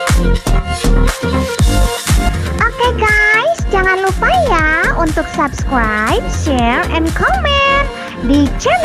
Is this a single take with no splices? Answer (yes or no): yes